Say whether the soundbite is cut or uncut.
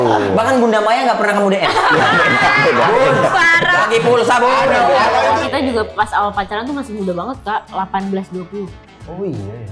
cut